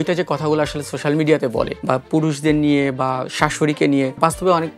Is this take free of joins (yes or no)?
yes